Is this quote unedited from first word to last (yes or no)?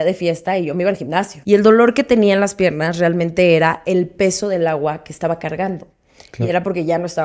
no